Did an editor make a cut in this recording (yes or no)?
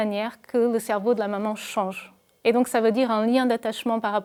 no